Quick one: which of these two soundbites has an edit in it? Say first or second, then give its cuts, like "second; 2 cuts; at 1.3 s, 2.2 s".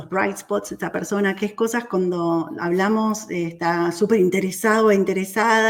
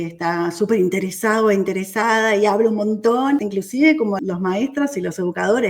second; 2 cuts; at 3.4 s, 4.2 s